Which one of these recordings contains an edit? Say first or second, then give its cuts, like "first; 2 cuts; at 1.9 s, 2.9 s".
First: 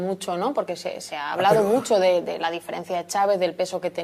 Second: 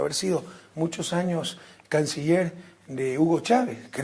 second; 1 cut; at 3.1 s